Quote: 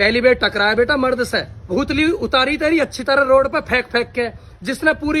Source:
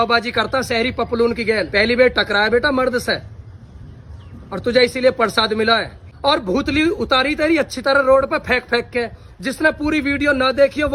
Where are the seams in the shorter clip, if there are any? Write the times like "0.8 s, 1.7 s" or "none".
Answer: 1.7 s